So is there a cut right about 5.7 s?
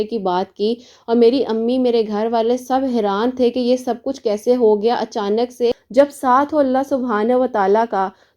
yes; 1 cut; at 5.7 s

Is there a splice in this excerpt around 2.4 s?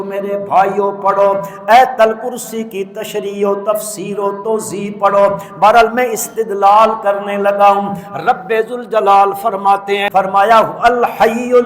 no; 1 cut; at 10.1 s

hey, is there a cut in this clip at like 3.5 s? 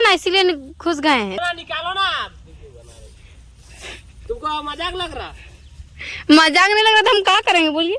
no; 1 cut; at 1.4 s

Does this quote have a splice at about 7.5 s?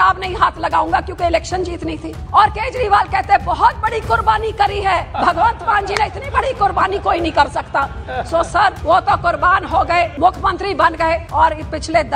no; 5 cuts; at 2.1 s, 5.1 s, 8.8 s, 10.1 s, 11.3 s

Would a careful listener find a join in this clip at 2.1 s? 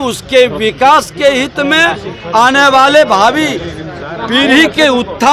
no; 0 cuts

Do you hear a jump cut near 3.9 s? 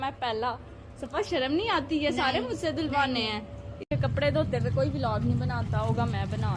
yes; 1 cut; at 3.9 s

